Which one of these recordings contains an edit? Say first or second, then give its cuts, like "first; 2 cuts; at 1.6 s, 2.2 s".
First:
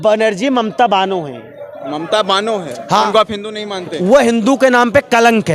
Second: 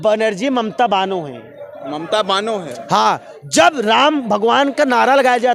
first; 1 cut; at 3.1 s